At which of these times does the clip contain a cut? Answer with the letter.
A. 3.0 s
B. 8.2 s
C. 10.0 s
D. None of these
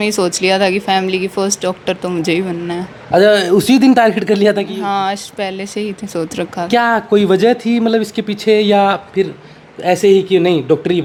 D